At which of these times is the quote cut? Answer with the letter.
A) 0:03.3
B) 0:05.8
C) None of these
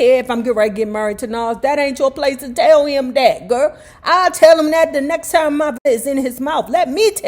B